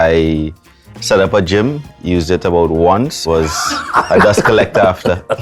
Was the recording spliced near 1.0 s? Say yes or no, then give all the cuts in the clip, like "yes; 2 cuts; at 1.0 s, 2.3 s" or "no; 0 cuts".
no; 1 cut; at 3.2 s